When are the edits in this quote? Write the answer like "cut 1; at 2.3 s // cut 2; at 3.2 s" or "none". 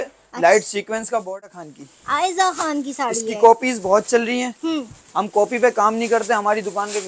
cut 1; at 1.4 s